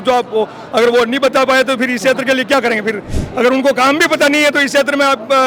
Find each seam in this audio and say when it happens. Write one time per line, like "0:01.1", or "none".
none